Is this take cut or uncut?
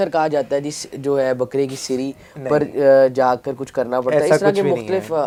uncut